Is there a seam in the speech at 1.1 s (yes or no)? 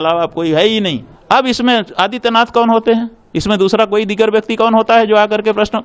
yes